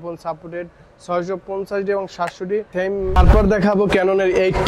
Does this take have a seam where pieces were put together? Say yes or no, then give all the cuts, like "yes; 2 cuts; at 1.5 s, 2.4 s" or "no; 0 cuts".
yes; 1 cut; at 2.9 s